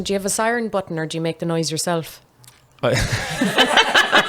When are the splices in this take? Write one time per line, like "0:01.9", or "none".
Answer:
none